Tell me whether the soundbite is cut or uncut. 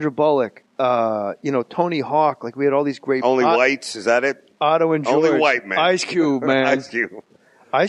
cut